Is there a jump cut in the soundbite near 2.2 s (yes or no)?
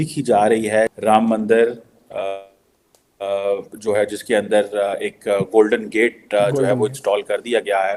no